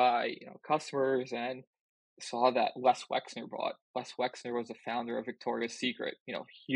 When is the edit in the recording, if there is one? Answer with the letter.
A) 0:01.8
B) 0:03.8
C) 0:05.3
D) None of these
D